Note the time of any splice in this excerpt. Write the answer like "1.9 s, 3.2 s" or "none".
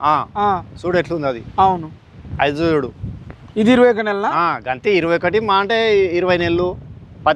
none